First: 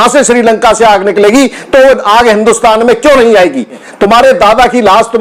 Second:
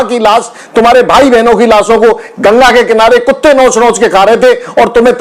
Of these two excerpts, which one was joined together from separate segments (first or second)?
first